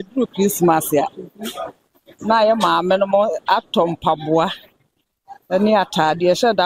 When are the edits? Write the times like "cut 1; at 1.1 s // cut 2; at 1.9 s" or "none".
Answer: none